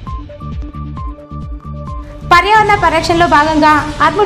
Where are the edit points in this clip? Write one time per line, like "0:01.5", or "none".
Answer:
none